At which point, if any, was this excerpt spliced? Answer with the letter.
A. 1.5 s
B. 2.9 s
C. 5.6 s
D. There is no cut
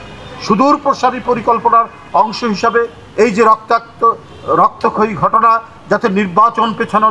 D